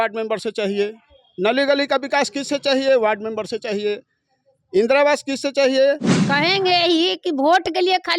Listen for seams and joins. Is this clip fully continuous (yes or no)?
no